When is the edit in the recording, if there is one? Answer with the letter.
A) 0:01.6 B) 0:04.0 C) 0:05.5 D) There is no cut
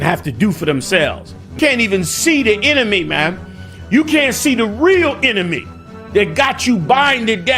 A